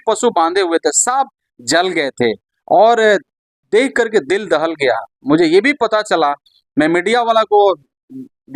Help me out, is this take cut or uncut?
uncut